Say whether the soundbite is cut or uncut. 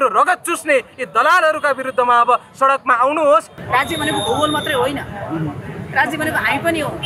cut